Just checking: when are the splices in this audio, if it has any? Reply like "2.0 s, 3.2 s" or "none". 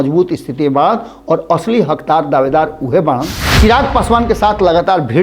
3.4 s